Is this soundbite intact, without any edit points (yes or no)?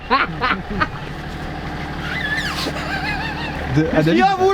no